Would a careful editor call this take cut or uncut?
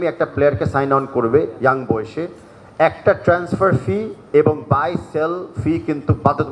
uncut